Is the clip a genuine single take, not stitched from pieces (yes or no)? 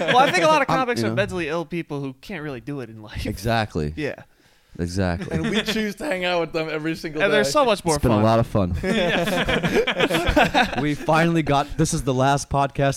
yes